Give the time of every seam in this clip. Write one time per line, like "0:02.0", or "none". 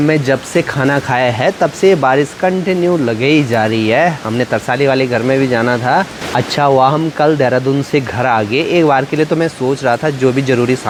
none